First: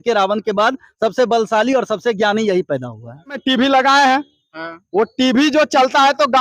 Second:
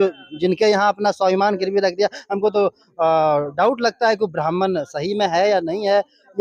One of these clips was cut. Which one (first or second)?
first